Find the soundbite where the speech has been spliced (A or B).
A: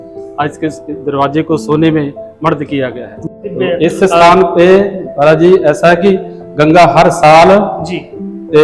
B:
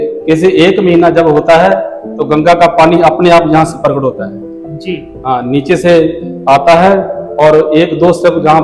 A